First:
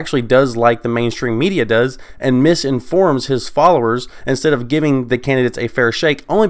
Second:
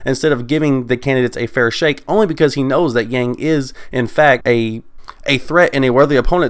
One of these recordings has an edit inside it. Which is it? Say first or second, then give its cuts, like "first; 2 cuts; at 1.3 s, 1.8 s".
second; 1 cut; at 4.4 s